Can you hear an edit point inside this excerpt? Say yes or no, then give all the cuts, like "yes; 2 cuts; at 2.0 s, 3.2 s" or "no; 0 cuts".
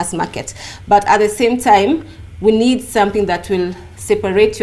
no; 0 cuts